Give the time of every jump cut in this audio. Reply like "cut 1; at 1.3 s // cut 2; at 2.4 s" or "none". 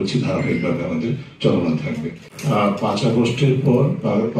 none